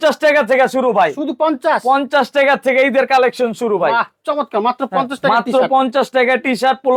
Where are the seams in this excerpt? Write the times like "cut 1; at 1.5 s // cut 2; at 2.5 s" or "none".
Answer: none